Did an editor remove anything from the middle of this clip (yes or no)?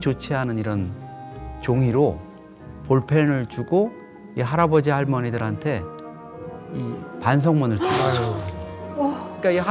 no